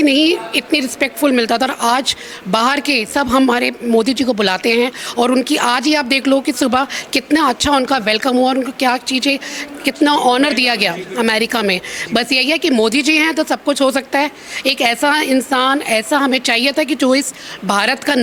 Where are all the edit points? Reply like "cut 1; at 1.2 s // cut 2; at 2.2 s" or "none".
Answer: none